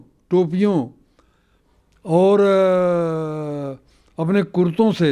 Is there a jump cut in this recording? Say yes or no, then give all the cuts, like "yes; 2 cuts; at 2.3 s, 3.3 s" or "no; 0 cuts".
no; 0 cuts